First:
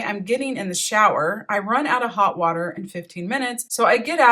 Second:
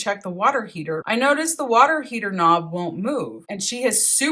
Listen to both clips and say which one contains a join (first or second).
second